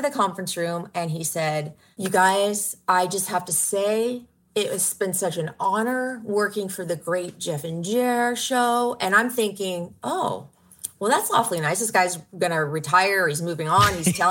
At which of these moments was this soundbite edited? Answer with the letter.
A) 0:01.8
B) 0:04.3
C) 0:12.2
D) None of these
A